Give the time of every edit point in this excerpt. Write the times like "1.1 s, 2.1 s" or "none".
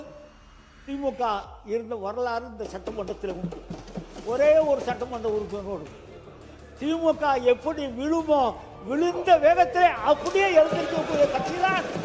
none